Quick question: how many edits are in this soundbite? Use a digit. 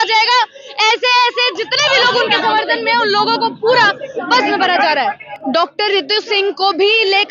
1